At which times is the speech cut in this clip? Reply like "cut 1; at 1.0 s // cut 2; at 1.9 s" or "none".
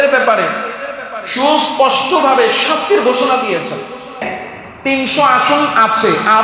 cut 1; at 4.2 s